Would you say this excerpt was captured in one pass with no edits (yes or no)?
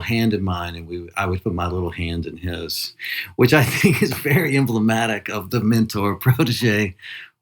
yes